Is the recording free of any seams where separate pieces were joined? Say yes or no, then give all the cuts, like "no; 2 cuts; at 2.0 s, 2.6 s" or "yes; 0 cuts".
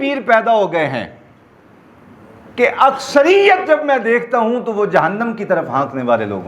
yes; 0 cuts